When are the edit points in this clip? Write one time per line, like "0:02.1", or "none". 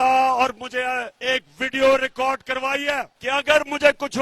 0:01.1
0:03.1